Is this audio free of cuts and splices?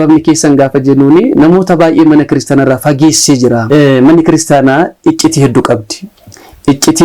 no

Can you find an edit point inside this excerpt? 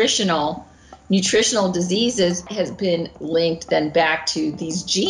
yes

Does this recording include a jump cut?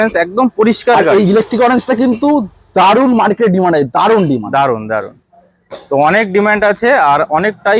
no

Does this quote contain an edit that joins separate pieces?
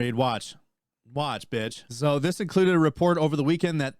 yes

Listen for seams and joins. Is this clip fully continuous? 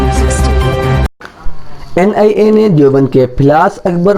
yes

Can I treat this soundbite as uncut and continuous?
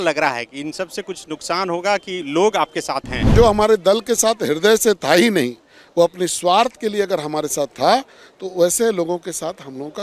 no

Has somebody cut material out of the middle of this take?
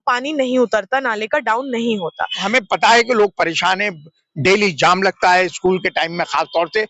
yes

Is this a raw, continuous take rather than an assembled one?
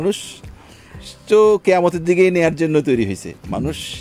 yes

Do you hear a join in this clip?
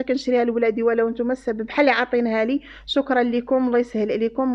no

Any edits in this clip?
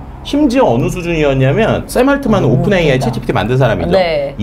yes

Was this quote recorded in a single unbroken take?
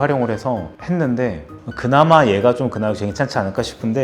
yes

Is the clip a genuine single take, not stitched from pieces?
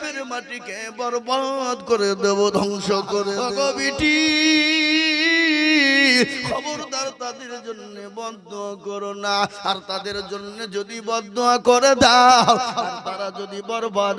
no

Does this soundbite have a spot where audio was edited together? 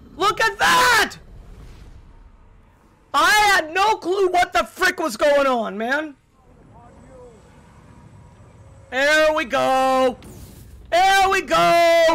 yes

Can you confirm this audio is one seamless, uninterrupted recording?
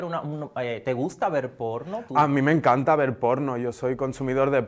yes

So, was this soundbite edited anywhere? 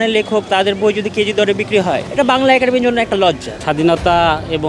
yes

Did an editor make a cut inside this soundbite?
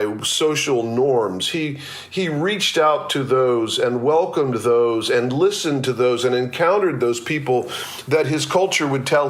no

